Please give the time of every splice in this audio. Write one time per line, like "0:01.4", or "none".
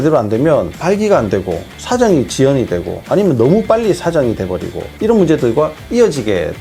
none